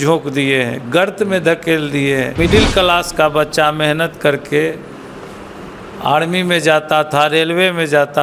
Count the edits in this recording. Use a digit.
1